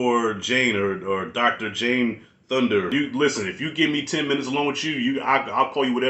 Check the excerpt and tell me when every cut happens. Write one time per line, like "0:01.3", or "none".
0:02.9

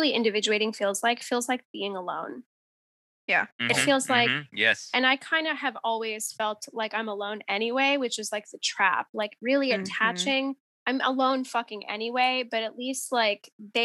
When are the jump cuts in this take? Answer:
none

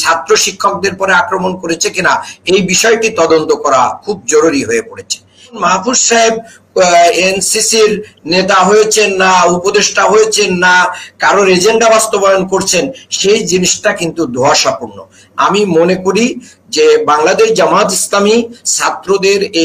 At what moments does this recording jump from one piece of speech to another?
0:05.6

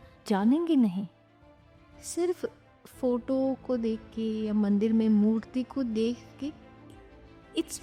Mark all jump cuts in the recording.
none

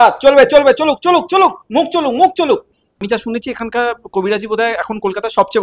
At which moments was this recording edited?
0:03.0

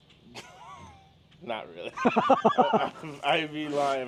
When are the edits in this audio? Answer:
none

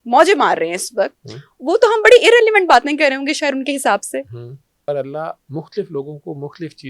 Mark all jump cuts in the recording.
0:04.9

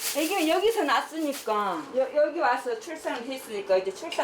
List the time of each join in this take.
0:01.8

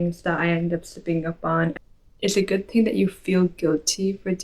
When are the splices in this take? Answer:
0:01.8

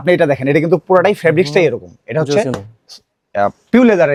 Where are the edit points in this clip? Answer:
none

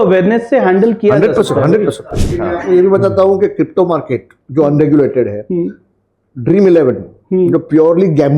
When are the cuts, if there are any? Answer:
0:02.3

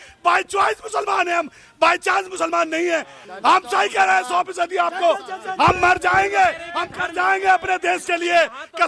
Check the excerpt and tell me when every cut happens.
0:03.2

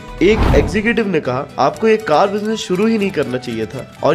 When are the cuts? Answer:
none

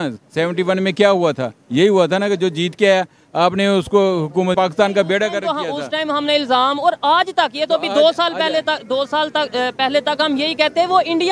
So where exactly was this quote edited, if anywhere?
0:04.5

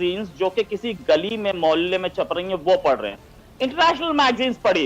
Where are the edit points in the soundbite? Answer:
none

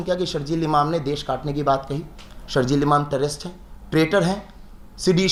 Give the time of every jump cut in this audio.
none

